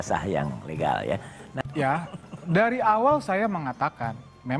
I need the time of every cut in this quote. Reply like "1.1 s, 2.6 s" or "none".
1.5 s